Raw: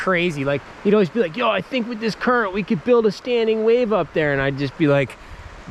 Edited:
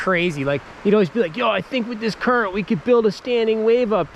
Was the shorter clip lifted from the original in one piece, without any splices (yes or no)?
yes